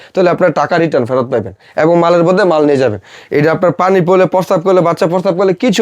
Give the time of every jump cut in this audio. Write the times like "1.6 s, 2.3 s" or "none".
none